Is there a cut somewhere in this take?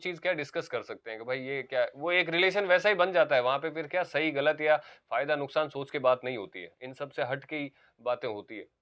no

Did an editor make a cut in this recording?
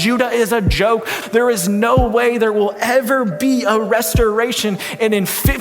yes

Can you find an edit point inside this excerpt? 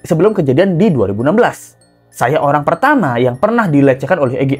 no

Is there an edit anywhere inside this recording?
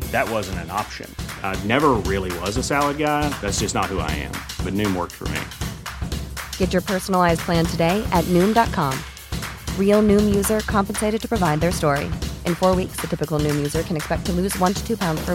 no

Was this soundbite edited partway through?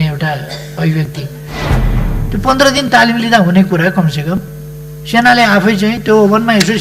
yes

